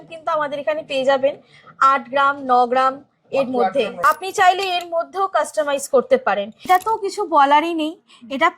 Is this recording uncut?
no; 2 cuts; at 3.9 s, 6.7 s

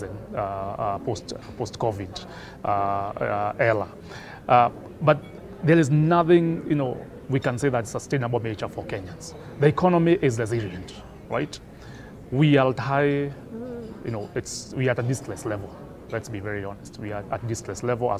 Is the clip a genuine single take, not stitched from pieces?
yes; 0 cuts

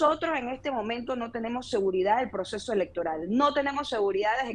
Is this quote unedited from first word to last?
yes; 0 cuts

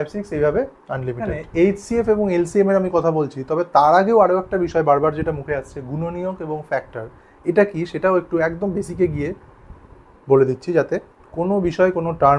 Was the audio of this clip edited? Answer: yes; 1 cut; at 1.4 s

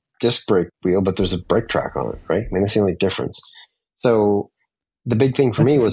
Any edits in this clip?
no; 0 cuts

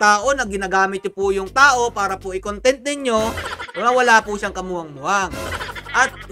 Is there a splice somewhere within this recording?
no; 0 cuts

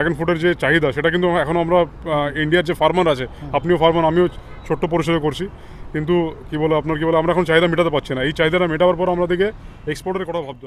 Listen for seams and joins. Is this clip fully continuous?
yes; 0 cuts

